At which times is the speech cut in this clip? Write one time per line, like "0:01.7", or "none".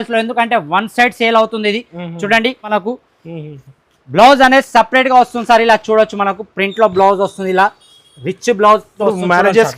0:02.7